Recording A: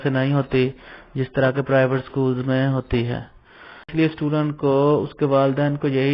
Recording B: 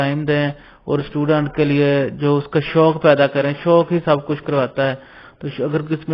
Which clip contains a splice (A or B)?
A